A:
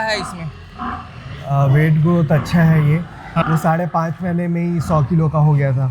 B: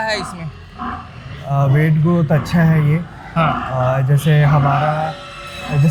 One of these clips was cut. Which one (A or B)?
A